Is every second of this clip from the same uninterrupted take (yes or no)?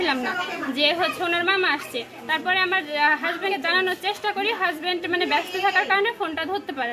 yes